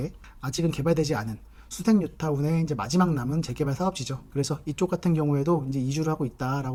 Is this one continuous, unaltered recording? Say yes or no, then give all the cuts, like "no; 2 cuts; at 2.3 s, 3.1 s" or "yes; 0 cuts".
yes; 0 cuts